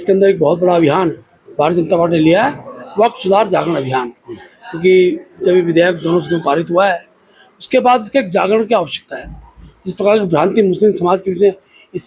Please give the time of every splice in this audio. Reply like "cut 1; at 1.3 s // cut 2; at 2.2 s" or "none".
none